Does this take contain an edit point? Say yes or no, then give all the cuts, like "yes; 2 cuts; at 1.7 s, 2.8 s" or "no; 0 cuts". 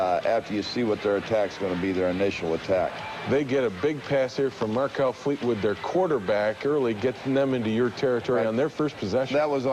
no; 0 cuts